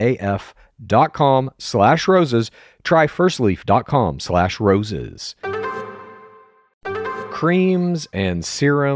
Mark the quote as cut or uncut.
cut